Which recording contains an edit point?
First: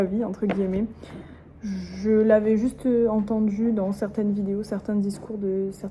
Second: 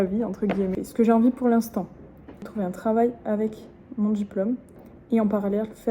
second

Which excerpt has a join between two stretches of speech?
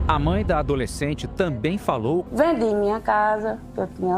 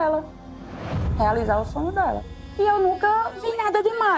first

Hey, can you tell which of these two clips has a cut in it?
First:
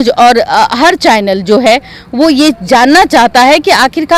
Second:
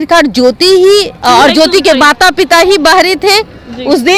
second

